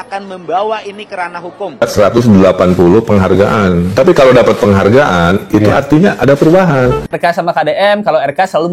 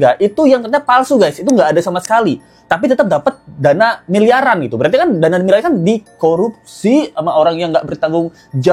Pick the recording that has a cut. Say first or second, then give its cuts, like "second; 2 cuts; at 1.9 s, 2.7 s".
first; 2 cuts; at 1.8 s, 7.2 s